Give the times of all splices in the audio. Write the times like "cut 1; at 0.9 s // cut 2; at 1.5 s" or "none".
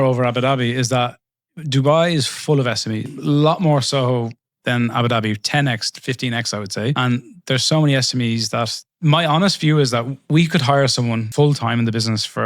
cut 1; at 11.3 s